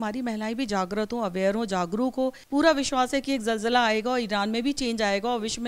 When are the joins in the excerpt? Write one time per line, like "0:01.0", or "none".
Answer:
0:02.4